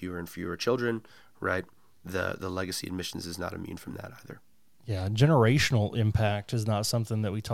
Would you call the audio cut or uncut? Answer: uncut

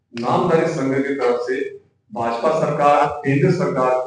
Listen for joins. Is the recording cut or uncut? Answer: uncut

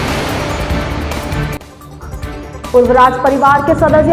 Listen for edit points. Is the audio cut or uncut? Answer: cut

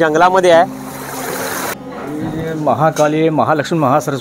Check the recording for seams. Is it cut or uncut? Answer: cut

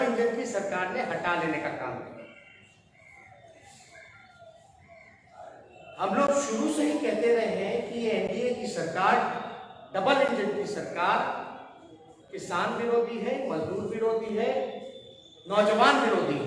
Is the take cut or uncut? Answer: uncut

